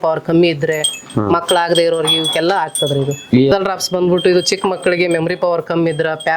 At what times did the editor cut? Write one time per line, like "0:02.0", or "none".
0:03.5